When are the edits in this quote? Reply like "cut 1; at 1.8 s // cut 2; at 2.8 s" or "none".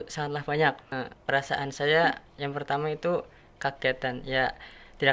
cut 1; at 0.9 s